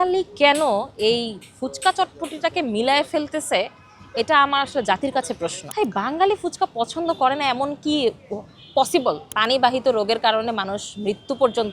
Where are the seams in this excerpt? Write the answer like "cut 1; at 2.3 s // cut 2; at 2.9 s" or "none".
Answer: cut 1; at 5.6 s // cut 2; at 9.3 s